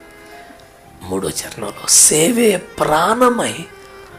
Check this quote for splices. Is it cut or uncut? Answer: uncut